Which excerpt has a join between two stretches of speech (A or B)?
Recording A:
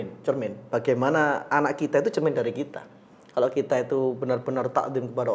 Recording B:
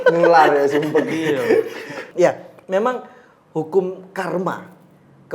B